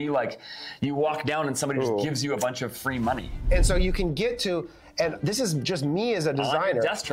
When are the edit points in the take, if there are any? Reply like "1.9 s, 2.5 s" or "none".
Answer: 3.5 s

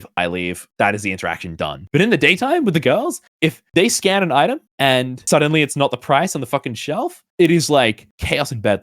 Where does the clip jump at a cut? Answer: none

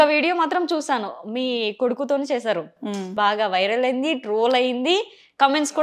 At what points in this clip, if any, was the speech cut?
3.1 s

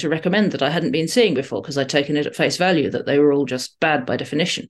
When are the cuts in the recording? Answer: none

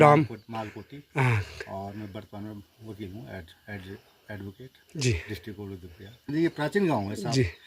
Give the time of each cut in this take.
6.3 s

